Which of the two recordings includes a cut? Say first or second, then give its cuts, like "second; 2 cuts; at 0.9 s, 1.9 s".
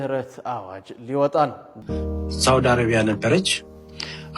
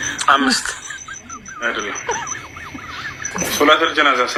first; 1 cut; at 1.8 s